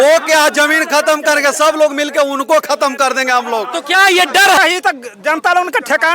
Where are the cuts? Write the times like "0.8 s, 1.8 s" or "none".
4.6 s

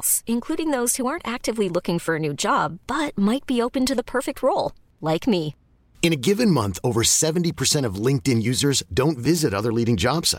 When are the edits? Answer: none

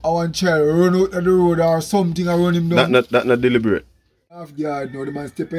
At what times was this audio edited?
4.5 s

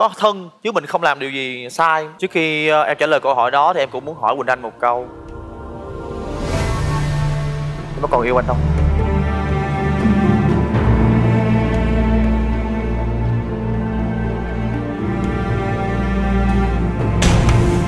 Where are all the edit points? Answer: 2.1 s

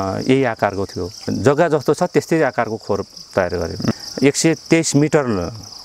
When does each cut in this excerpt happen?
1.2 s, 4.0 s

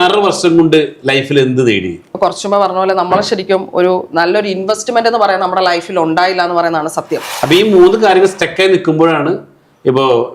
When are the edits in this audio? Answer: 2.1 s, 7.2 s

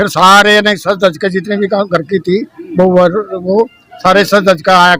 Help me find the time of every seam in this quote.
none

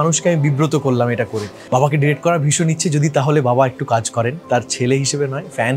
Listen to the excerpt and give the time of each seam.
1.6 s, 4.4 s

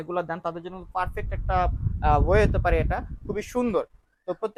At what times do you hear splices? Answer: none

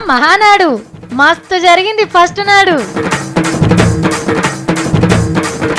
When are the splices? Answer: 4.5 s

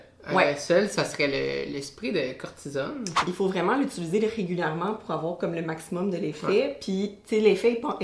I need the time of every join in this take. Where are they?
3.2 s

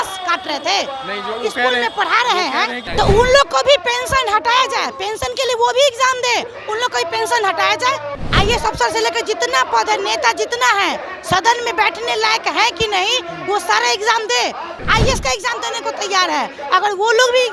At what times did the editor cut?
2.9 s, 8.2 s, 14.8 s

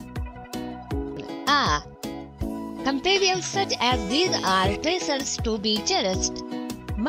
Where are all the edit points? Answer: 1.1 s

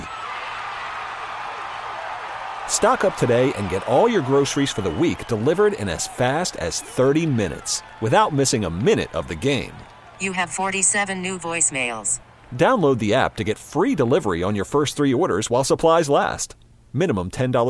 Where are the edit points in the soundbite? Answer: none

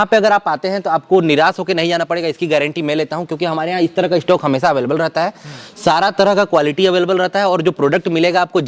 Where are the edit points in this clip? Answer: none

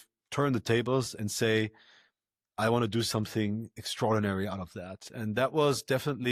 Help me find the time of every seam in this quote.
none

